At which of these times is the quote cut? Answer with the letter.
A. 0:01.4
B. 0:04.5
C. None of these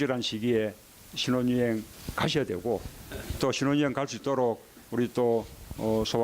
A